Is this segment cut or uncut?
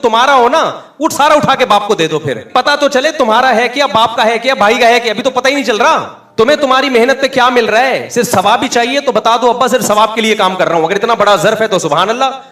cut